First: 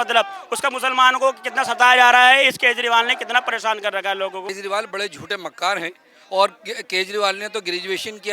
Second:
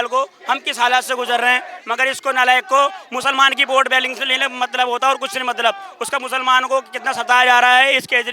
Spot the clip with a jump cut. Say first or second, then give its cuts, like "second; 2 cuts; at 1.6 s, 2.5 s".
first; 1 cut; at 4.5 s